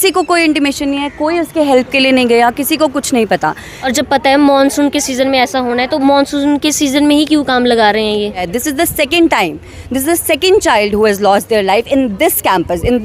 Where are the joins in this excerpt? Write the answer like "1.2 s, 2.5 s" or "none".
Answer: 3.7 s, 8.5 s